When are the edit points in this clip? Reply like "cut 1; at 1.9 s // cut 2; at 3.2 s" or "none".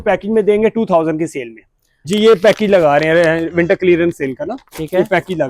cut 1; at 2.0 s